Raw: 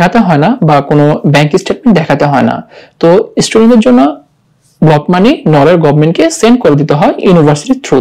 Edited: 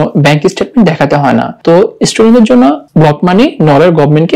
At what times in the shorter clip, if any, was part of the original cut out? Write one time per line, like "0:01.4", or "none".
0:01.5
0:02.8